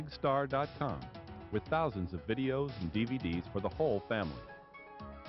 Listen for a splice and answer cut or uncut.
cut